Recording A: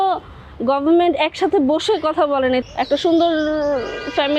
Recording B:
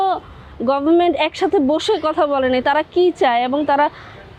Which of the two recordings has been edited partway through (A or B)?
A